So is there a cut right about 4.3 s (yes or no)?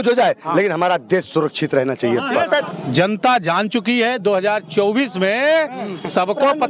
no